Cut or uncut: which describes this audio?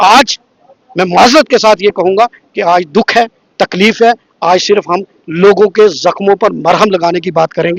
uncut